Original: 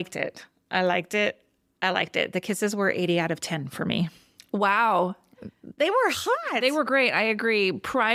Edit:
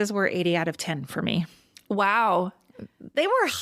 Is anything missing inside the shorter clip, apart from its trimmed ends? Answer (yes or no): no